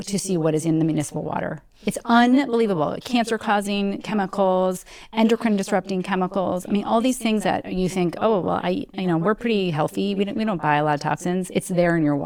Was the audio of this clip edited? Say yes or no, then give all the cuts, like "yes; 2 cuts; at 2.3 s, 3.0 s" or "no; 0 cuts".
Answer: no; 0 cuts